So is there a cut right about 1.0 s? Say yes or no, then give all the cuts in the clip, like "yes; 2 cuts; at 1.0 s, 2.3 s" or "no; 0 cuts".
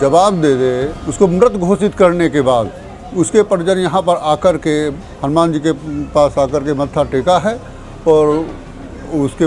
yes; 1 cut; at 1.0 s